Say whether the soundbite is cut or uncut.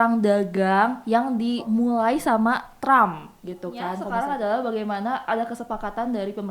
cut